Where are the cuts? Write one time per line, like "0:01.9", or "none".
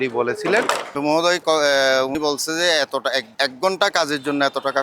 0:00.9
0:02.1
0:03.3